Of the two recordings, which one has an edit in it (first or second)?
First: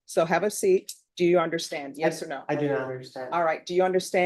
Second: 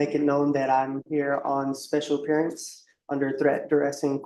first